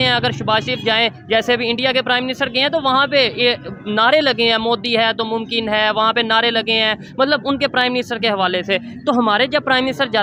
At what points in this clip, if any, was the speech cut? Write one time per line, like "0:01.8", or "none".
none